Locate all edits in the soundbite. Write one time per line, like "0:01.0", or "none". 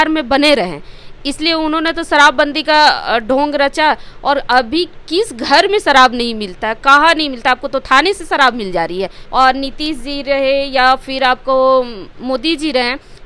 0:09.2